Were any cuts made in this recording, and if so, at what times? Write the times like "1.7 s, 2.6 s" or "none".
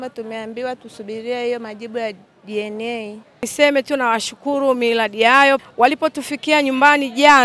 3.5 s

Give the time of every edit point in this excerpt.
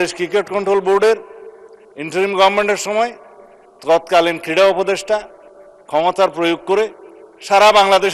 none

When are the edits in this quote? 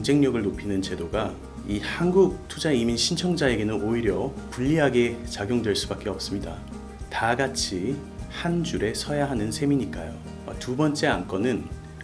none

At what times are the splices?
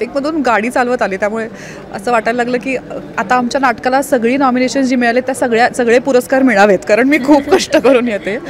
none

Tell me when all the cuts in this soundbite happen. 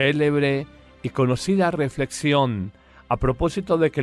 1.5 s

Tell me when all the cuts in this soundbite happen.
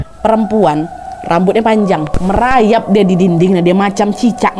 2.1 s

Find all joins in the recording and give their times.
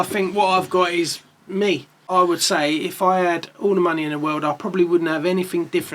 2.0 s

